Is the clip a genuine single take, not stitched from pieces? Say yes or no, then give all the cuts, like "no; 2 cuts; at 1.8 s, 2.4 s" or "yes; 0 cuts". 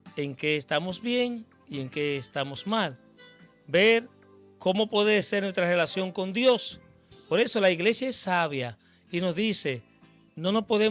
yes; 0 cuts